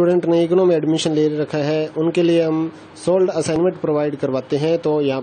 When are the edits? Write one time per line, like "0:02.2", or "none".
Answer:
0:03.5